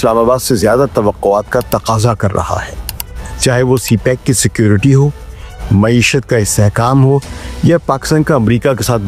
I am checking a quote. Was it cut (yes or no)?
no